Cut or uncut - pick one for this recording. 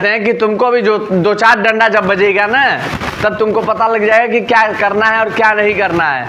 uncut